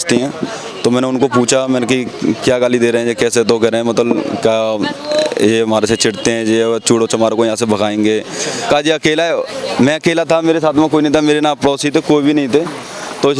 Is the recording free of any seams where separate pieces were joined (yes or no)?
no